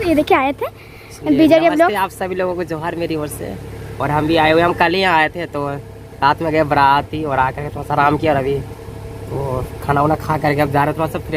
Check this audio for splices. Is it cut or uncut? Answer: uncut